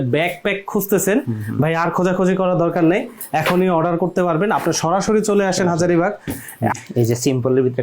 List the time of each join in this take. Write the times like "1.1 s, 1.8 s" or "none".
6.8 s